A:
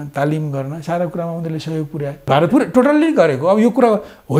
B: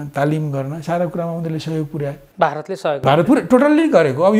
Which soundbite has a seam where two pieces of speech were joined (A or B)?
A